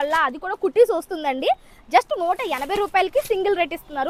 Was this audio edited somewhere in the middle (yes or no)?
no